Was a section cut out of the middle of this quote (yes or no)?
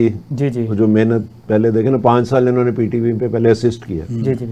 no